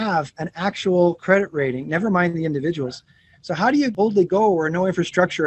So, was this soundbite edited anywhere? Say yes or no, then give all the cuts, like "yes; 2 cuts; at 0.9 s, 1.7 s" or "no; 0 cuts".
yes; 1 cut; at 3.9 s